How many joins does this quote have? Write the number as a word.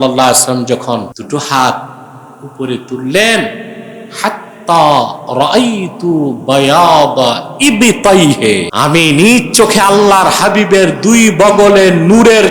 two